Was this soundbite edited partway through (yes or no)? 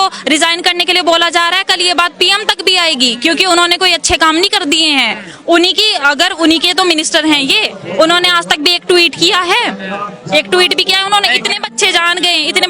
no